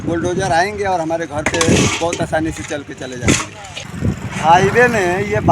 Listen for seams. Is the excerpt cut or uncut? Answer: cut